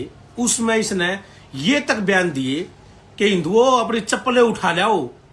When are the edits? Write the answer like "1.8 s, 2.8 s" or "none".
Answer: none